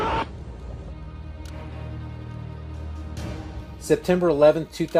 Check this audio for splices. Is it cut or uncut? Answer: uncut